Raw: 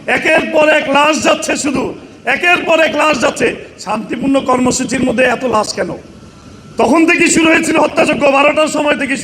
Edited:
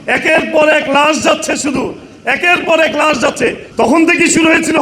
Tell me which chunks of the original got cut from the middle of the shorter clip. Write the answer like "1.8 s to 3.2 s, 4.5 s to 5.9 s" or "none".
3.6 s to 6.6 s